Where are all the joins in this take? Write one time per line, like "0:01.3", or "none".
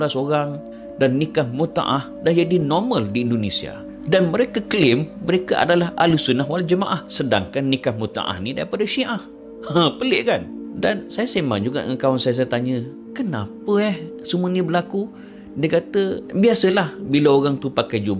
none